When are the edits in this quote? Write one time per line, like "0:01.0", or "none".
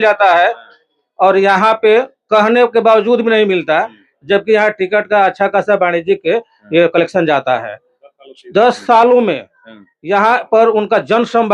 none